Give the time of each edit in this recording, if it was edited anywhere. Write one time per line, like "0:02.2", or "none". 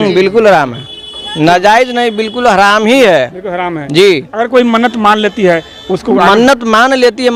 none